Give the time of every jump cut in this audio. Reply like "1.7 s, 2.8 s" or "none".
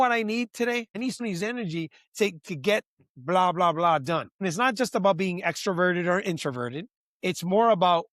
1.2 s, 4.3 s